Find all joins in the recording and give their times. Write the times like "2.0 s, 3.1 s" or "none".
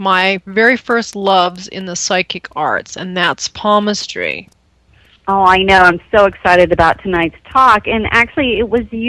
1.3 s

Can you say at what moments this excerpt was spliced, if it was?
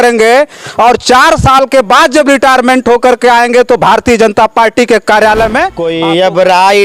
5.8 s

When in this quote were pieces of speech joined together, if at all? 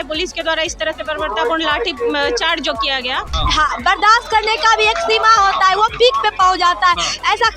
3.3 s

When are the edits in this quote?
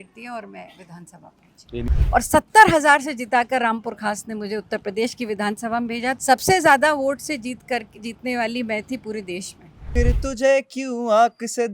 1.9 s, 6.2 s, 9.8 s

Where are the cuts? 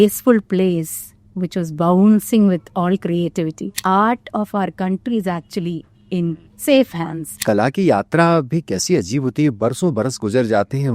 3.7 s, 7.4 s

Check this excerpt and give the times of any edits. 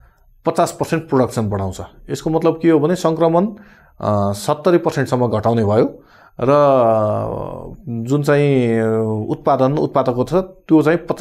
none

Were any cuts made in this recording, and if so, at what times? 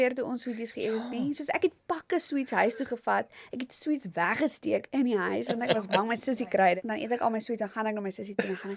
6.8 s

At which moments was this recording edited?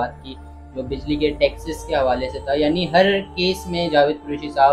none

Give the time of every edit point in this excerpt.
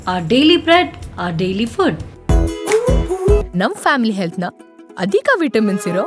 2.1 s

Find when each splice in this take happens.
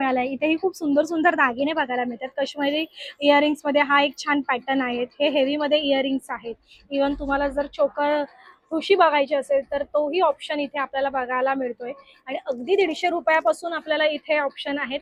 none

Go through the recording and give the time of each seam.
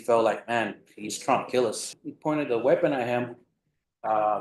1.9 s

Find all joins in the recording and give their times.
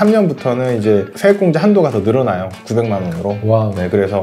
1.1 s

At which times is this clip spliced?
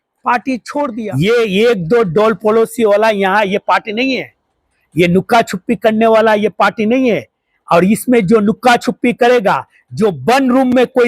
0.9 s

